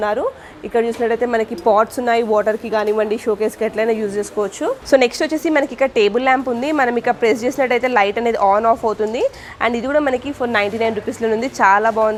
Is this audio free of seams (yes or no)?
yes